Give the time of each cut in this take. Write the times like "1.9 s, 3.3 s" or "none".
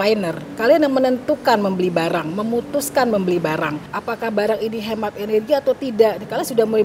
3.9 s